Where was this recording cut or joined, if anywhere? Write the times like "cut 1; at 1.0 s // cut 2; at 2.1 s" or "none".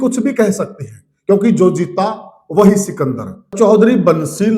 cut 1; at 3.5 s